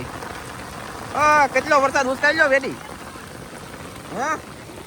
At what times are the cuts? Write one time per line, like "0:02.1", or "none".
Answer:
none